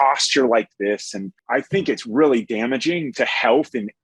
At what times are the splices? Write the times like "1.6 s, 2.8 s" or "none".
1.3 s, 3.1 s